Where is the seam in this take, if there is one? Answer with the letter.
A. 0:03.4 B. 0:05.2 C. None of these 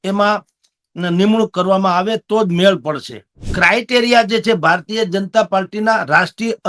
A